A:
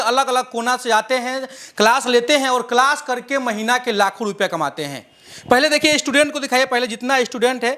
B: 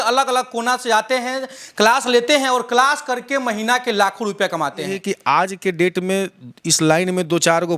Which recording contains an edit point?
B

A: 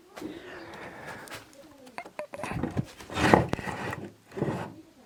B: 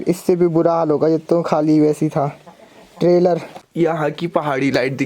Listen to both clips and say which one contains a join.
B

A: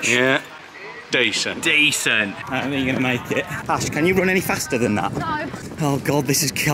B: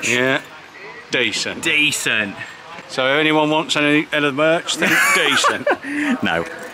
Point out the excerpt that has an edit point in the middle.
A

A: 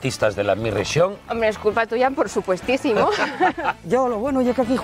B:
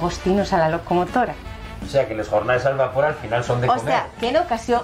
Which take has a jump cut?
A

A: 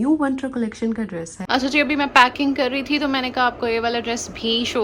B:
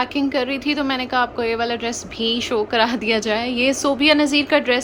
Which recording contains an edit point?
A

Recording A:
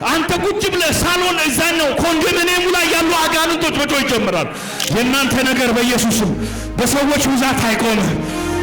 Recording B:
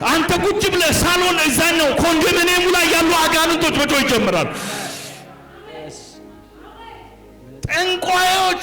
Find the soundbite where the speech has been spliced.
A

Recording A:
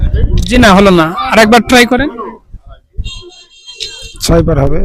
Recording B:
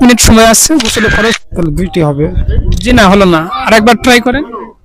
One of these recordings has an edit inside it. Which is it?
B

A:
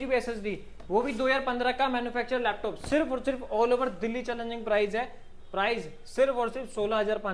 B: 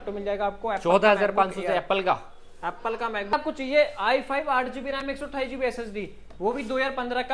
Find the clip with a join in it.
B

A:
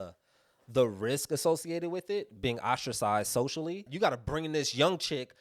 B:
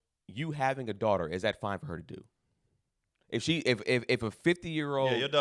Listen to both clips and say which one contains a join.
A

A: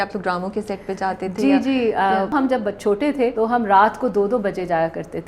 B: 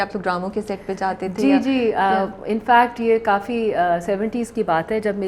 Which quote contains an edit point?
A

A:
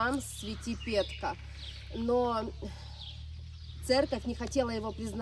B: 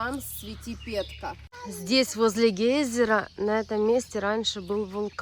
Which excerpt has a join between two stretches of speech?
B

